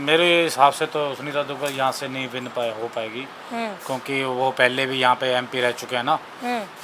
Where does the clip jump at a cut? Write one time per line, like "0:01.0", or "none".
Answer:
none

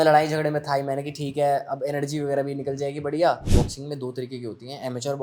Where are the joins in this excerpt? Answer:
0:03.4

